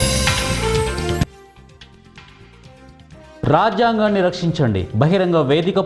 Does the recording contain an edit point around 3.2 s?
no; 0 cuts

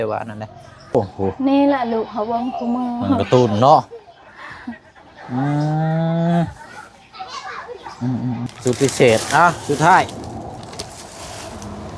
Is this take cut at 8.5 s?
yes; 2 cuts; at 0.9 s, 8.5 s

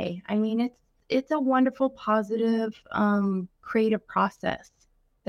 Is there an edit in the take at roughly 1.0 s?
yes; 1 cut; at 1.0 s

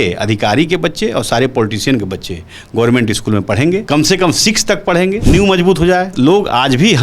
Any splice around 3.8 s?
yes; 3 cuts; at 3.8 s, 5.2 s, 6.1 s

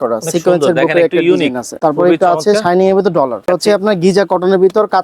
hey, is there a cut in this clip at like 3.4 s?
yes; 2 cuts; at 1.6 s, 3.4 s

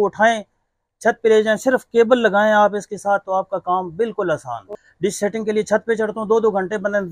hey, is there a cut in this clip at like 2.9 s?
no; 1 cut; at 4.7 s

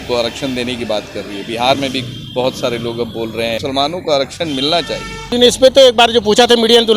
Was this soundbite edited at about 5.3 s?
yes; 2 cuts; at 3.6 s, 5.3 s

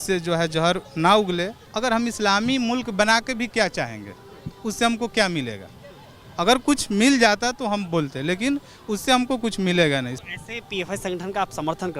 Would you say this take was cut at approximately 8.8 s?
no; 2 cuts; at 1.6 s, 10.1 s

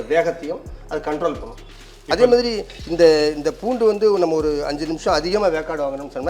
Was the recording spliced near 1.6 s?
yes; 1 cut; at 1.6 s

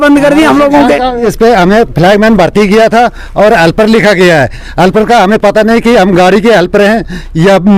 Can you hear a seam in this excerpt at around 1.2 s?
yes; 1 cut; at 1.2 s

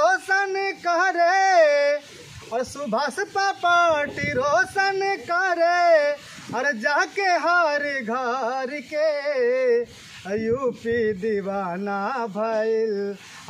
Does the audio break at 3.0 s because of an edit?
no; 0 cuts

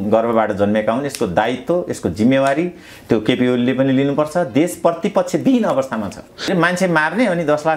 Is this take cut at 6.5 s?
yes; 1 cut; at 6.5 s

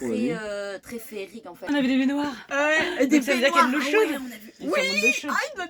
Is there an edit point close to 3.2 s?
no; 1 cut; at 1.7 s

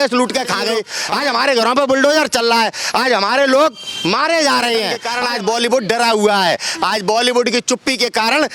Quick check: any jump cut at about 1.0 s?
yes; 2 cuts; at 1.0 s, 5.0 s

